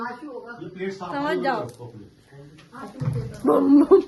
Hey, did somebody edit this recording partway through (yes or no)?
no